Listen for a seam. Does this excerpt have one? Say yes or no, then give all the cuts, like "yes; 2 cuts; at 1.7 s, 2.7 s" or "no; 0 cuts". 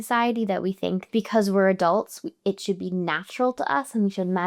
yes; 1 cut; at 1.0 s